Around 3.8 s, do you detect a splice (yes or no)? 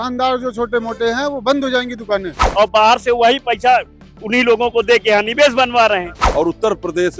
no